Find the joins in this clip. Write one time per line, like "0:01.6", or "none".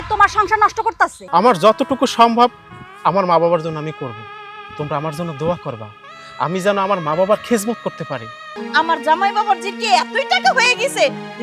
0:01.2
0:08.6